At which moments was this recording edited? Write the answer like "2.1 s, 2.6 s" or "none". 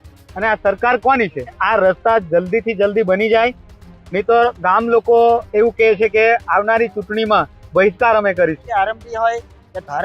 1.6 s, 8.6 s